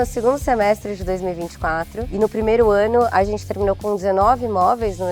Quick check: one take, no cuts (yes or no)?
no